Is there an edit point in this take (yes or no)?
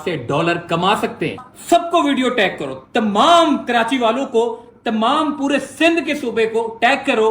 yes